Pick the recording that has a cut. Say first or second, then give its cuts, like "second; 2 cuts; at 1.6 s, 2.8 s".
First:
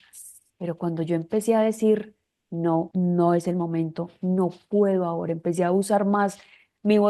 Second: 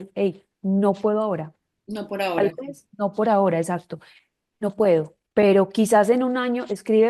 first; 1 cut; at 2.9 s